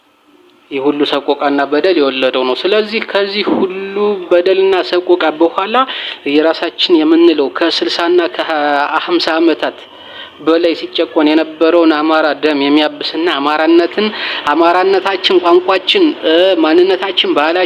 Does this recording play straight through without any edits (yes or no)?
yes